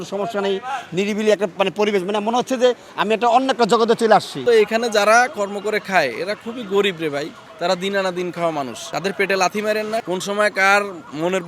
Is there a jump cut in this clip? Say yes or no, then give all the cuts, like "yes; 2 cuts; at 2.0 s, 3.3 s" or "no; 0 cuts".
yes; 4 cuts; at 4.4 s, 7.4 s, 8.8 s, 10.0 s